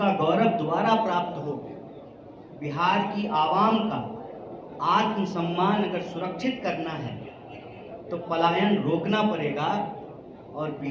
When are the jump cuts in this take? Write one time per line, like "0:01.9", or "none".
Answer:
none